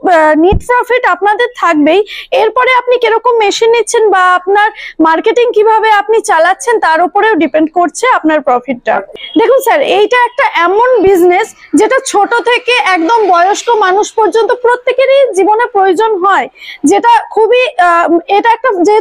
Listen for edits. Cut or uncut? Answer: cut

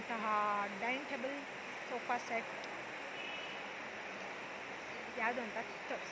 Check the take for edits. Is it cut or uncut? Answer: uncut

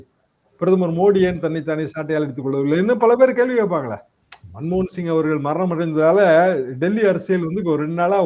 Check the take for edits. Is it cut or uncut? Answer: uncut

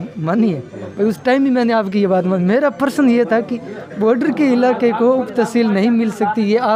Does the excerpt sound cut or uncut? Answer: uncut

